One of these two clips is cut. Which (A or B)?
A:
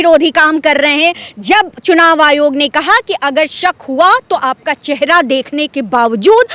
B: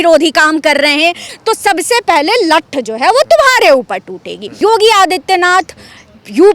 B